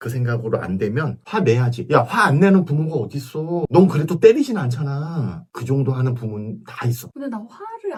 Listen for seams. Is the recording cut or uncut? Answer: uncut